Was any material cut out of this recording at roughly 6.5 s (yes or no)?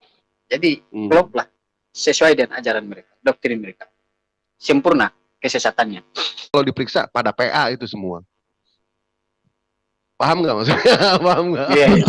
yes